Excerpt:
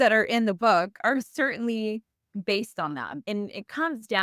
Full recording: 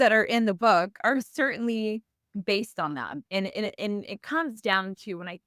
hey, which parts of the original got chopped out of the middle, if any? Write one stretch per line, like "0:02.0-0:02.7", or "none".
0:03.2-0:03.8